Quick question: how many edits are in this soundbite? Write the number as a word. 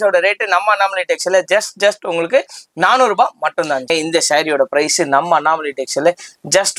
one